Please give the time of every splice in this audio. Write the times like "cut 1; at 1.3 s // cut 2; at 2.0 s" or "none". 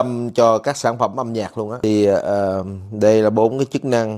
none